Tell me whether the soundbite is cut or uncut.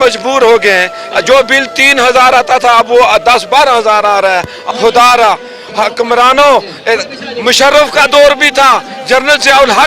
cut